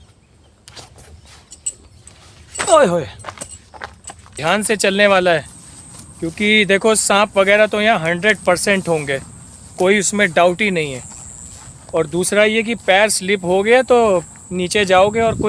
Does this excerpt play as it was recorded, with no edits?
no; 1 cut; at 4.3 s

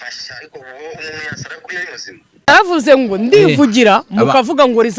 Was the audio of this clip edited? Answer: yes; 1 cut; at 2.5 s

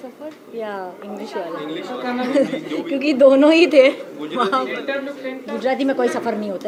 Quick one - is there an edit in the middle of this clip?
no; 0 cuts

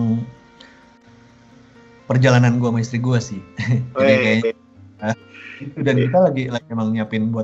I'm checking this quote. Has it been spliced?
yes; 1 cut; at 5.2 s

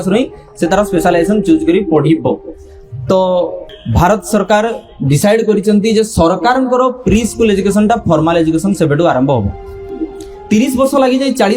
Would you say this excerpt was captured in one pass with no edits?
no; 2 cuts; at 3.6 s, 10.0 s

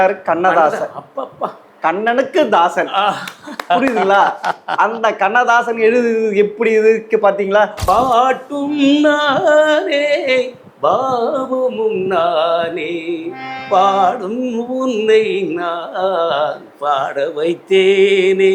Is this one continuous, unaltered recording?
no; 1 cut; at 7.8 s

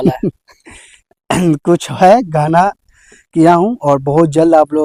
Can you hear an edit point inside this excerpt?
no; 0 cuts

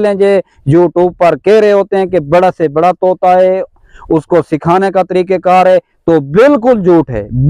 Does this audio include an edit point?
no; 0 cuts

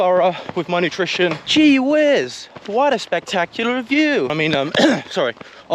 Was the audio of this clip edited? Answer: yes; 2 cuts; at 1.4 s, 4.3 s

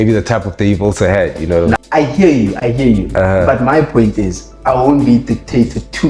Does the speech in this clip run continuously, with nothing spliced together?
no; 1 cut; at 1.8 s

